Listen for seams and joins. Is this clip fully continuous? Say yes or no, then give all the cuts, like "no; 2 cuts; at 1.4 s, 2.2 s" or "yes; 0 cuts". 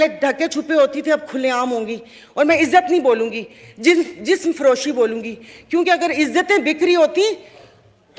yes; 0 cuts